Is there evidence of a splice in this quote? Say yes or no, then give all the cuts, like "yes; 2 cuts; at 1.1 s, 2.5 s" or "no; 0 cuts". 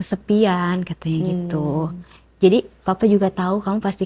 no; 0 cuts